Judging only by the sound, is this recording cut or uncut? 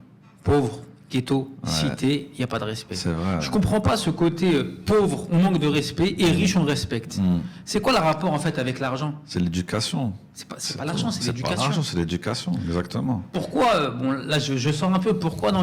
uncut